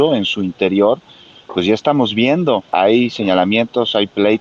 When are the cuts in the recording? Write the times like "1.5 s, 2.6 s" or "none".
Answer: 2.7 s